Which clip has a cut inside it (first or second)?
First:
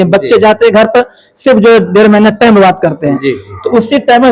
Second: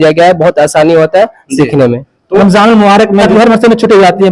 second